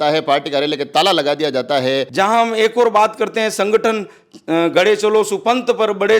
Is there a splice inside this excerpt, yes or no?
yes